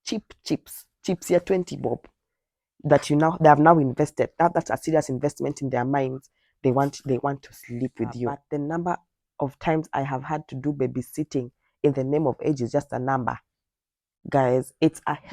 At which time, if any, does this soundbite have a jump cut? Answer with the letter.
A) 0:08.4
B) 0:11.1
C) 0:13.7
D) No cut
A